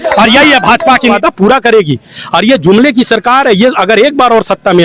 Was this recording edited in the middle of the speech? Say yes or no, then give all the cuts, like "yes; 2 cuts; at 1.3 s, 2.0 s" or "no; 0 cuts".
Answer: yes; 1 cut; at 1.1 s